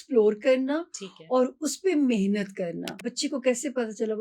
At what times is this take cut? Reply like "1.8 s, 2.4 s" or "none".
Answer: 3.0 s